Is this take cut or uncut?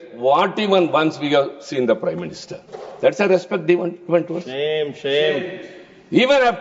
uncut